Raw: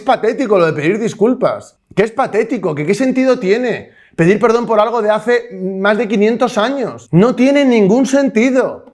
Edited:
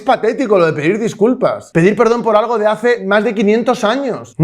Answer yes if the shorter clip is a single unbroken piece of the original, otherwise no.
no